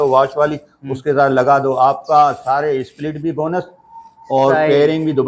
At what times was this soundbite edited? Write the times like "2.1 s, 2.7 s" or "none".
none